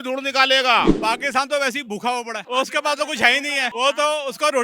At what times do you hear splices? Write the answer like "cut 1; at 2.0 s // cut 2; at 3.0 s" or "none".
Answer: cut 1; at 0.9 s // cut 2; at 2.4 s // cut 3; at 3.7 s

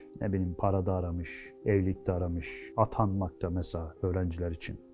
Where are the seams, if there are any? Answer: none

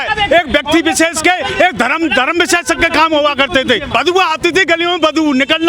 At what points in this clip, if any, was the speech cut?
cut 1; at 3.9 s

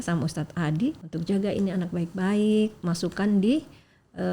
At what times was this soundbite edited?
cut 1; at 1.1 s

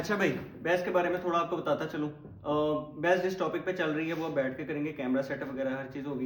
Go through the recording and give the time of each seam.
none

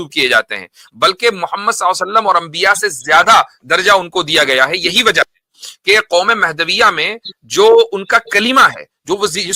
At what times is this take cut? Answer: none

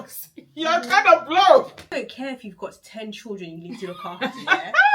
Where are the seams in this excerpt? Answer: cut 1; at 1.9 s

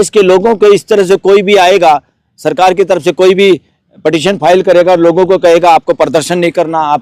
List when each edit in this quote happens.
none

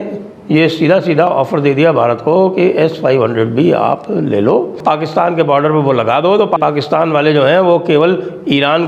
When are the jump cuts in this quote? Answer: cut 1; at 4.8 s // cut 2; at 6.6 s

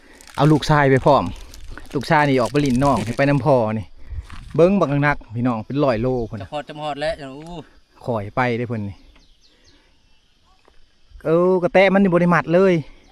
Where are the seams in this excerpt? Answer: none

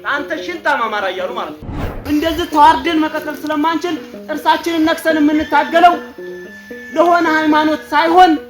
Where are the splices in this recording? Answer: cut 1; at 2.0 s

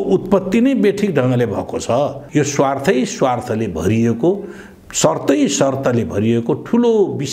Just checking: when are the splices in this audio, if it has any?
cut 1; at 2.2 s

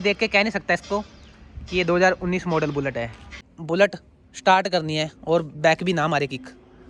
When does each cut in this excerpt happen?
cut 1; at 3.5 s

